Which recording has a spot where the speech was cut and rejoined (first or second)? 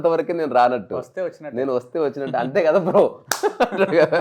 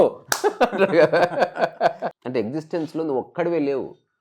second